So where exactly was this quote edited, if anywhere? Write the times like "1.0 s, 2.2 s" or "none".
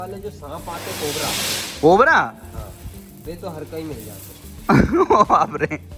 none

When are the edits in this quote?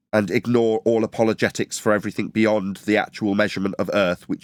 none

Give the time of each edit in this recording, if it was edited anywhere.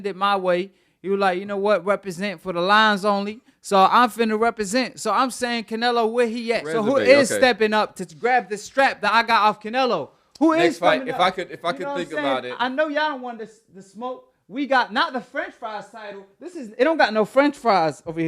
6.7 s

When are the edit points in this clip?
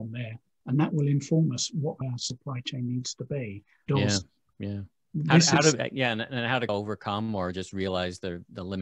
2.0 s, 3.8 s, 6.7 s

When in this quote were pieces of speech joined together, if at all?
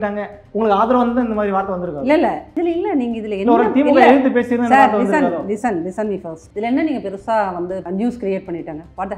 6.4 s, 7.8 s

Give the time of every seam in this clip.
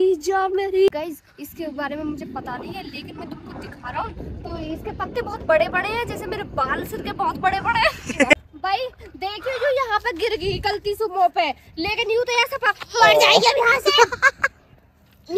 1.0 s, 8.3 s

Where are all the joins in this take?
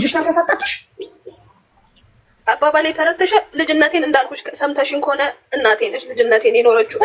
none

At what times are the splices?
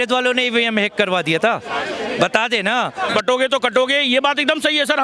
3.1 s

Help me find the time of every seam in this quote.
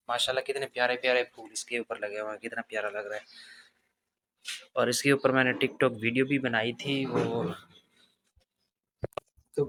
none

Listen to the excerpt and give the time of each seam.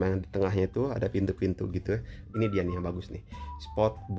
2.2 s

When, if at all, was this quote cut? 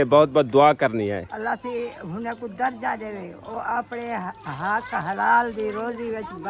none

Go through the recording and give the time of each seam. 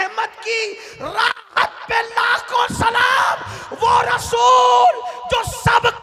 none

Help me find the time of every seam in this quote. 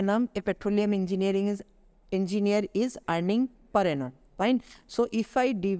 none

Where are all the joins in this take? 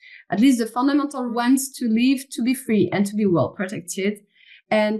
1.3 s

